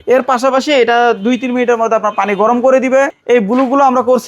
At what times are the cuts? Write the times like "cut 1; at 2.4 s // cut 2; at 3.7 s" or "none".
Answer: cut 1; at 3.1 s